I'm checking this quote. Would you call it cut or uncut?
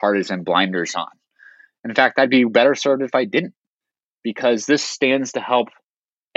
uncut